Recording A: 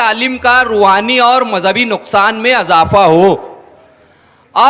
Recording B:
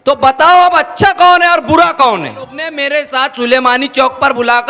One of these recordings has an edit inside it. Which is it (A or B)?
B